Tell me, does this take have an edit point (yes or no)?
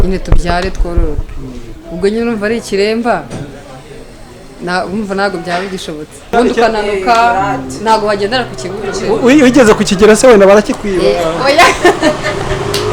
yes